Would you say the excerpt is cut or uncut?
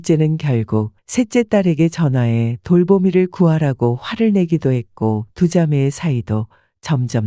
cut